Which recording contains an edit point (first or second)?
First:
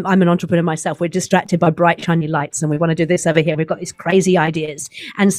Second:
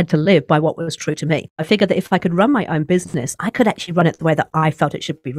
second